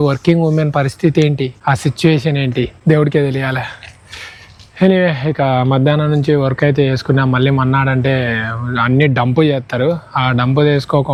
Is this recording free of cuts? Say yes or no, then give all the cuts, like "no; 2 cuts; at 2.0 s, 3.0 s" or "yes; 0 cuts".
yes; 0 cuts